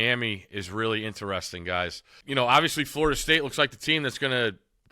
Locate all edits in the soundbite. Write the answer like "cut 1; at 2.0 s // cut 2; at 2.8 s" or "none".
cut 1; at 2.1 s